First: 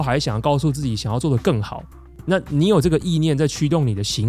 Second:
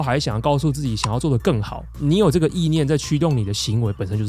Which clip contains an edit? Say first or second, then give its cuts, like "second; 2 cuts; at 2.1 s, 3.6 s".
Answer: second; 1 cut; at 2.0 s